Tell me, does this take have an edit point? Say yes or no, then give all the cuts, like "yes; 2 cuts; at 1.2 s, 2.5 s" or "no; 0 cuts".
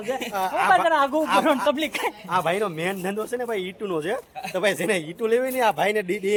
no; 0 cuts